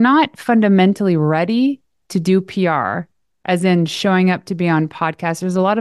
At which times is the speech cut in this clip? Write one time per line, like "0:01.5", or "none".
none